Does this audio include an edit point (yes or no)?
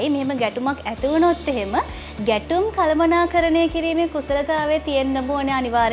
no